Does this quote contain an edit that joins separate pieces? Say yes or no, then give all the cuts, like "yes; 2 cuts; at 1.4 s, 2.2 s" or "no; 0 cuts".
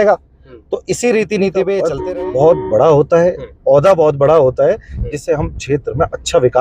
yes; 1 cut; at 1.9 s